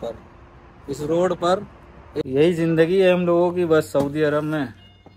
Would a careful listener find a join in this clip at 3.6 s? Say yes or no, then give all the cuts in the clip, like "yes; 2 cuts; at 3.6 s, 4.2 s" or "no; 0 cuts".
no; 1 cut; at 2.2 s